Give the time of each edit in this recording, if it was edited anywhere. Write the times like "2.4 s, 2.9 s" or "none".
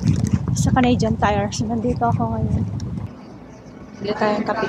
3.0 s